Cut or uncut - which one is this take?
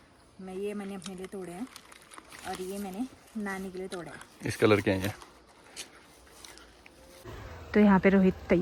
uncut